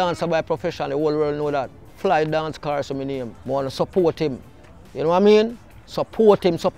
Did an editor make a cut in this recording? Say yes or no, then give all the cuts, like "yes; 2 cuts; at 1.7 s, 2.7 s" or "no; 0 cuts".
yes; 2 cuts; at 1.8 s, 3.3 s